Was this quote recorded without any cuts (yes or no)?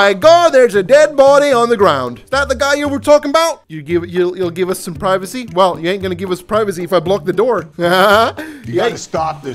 yes